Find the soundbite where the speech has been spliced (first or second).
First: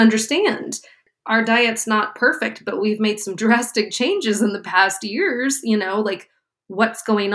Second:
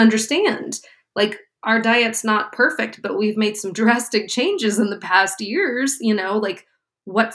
first